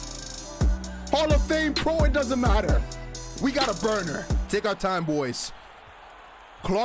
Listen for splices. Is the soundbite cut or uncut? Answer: cut